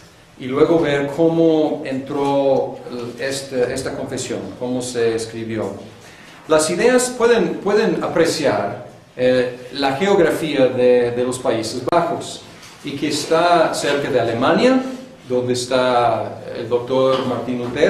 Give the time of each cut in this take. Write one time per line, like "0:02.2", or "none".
0:05.8